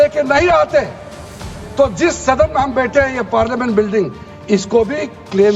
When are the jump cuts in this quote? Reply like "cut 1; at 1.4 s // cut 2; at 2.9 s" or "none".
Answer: none